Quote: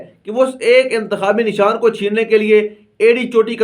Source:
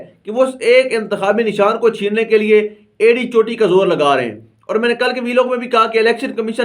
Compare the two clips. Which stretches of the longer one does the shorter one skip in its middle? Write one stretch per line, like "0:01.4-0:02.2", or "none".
none